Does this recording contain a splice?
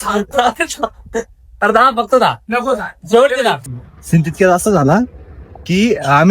yes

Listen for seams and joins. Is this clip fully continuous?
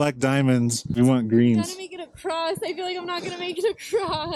yes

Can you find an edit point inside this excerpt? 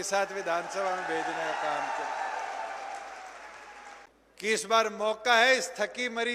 yes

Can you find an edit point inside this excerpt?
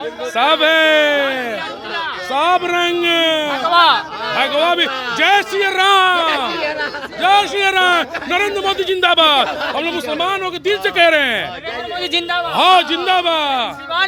no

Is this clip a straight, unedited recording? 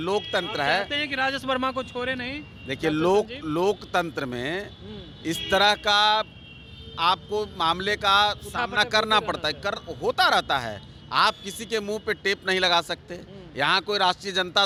yes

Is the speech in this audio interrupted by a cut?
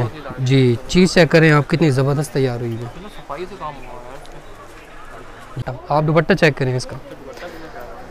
yes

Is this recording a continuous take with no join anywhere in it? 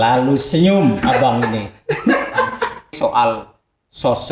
no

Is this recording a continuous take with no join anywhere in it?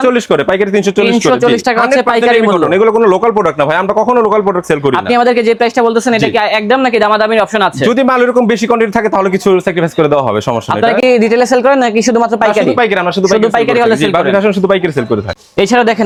yes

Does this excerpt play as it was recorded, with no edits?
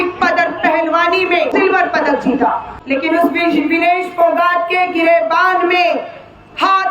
no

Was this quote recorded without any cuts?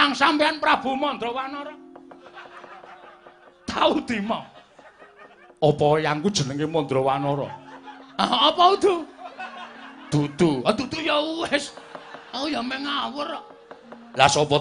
yes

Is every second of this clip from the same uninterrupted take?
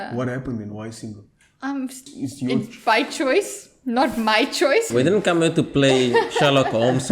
no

